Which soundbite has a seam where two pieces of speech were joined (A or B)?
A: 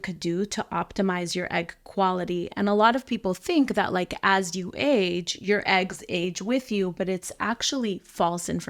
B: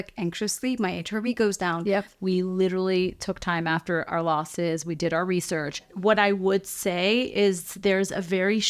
B